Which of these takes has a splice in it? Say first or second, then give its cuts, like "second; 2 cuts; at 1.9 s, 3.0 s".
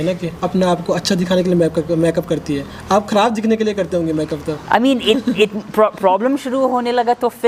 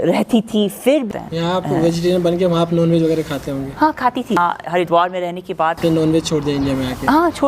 second; 3 cuts; at 1.1 s, 4.4 s, 5.8 s